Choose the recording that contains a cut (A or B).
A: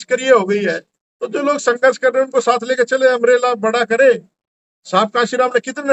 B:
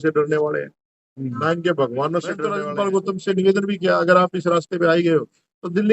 B